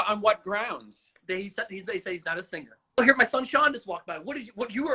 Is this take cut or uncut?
cut